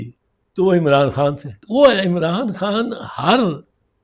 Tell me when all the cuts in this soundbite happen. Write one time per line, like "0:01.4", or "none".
0:01.6